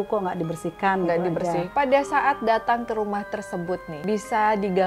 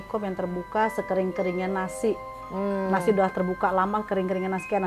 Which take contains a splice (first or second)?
first